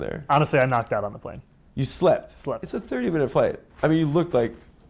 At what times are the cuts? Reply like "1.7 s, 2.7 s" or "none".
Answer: none